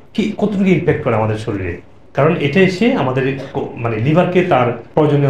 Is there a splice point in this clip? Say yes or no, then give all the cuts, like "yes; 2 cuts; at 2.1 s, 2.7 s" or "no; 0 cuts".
no; 0 cuts